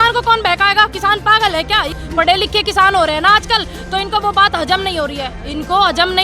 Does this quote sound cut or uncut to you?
cut